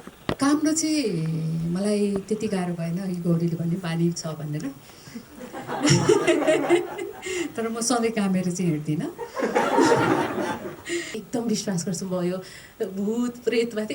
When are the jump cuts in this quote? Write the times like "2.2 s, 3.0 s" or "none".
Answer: 11.2 s

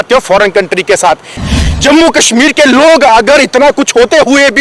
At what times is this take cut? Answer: 1.4 s

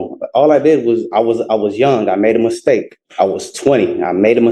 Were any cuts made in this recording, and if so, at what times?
3.0 s

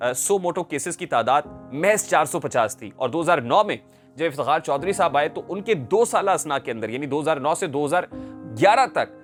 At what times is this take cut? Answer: none

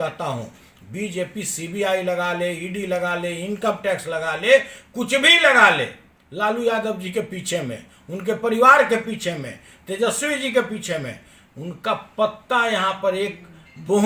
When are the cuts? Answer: none

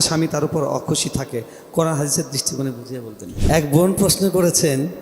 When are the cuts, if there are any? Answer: 3.3 s

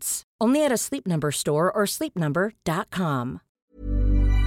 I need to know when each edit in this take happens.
3.5 s

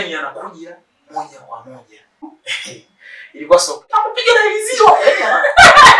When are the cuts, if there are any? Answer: 2.2 s, 3.9 s

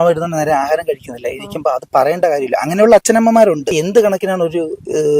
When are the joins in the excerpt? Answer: 3.8 s

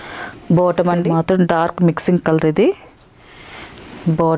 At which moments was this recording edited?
1.0 s

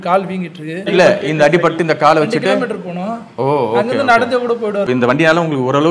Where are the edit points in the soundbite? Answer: 0.9 s, 4.9 s

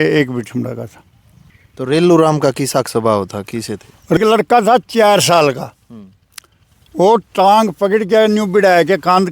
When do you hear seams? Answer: 1.4 s, 4.2 s

